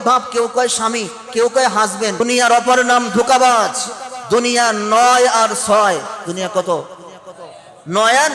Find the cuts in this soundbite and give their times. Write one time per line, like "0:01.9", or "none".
0:02.2